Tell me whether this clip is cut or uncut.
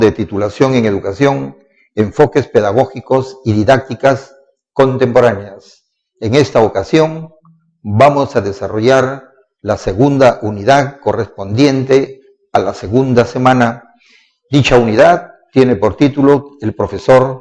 cut